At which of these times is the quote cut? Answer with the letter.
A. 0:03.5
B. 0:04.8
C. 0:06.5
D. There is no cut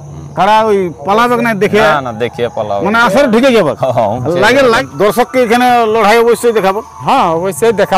B